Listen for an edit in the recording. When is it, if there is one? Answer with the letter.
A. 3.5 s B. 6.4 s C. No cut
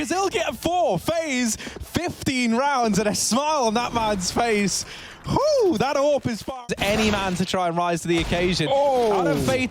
B